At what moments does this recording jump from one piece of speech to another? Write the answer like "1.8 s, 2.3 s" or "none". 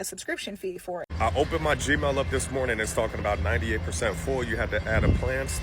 1.1 s